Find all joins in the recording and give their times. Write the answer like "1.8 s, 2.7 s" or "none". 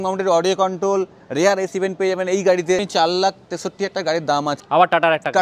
2.9 s, 4.6 s